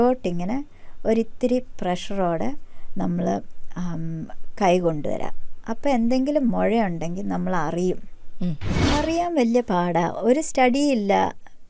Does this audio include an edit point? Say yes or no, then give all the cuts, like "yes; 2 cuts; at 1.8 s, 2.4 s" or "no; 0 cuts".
yes; 1 cut; at 8.7 s